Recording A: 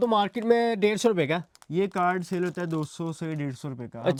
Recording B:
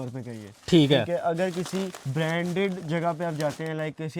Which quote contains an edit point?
B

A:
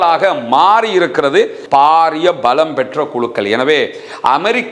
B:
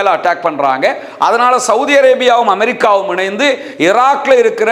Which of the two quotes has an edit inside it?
A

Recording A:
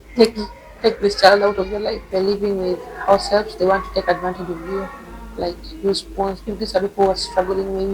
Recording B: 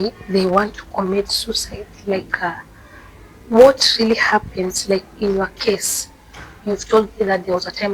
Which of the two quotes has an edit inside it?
A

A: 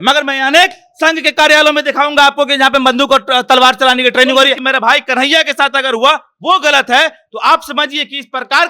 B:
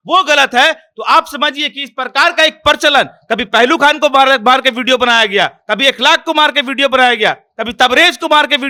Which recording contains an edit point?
A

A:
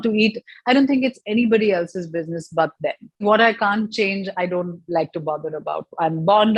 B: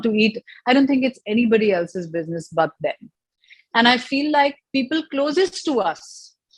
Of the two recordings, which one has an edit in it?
A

